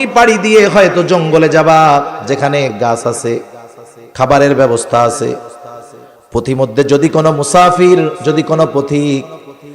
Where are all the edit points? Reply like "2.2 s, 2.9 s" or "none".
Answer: 2.7 s